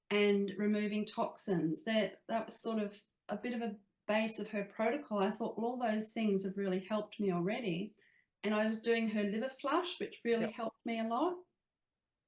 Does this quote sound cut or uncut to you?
uncut